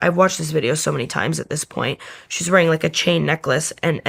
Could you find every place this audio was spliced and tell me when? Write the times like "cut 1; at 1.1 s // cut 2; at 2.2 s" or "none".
none